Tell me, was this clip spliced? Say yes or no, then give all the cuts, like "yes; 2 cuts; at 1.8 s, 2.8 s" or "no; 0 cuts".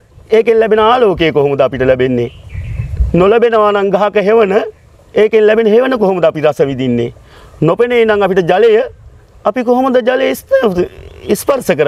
no; 0 cuts